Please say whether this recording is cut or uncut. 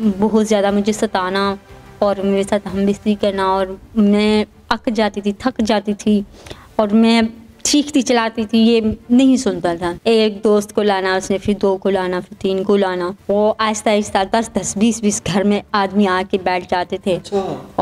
cut